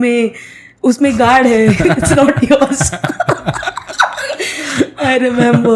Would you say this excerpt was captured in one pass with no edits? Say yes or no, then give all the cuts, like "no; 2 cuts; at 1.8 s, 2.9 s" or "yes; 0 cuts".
yes; 0 cuts